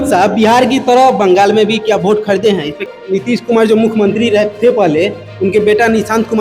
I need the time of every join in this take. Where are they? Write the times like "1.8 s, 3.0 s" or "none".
2.9 s